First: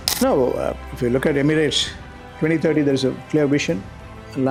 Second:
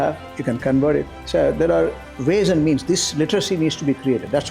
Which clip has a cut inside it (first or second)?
second